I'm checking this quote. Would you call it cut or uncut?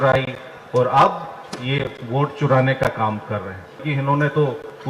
cut